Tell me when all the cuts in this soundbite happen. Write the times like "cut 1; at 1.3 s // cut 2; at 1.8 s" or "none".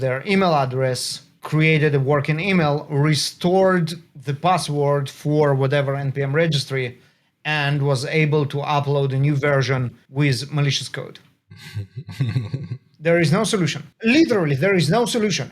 cut 1; at 1.3 s // cut 2; at 10.0 s // cut 3; at 13.8 s